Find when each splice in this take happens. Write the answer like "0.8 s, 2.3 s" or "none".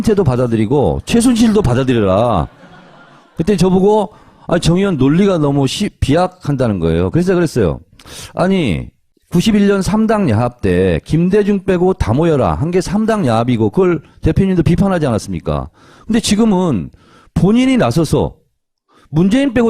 7.7 s